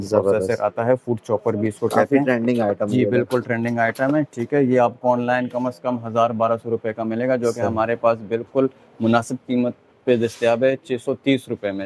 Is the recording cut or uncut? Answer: uncut